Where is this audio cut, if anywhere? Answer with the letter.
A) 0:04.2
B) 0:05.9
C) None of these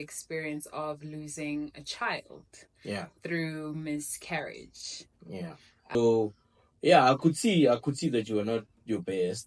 B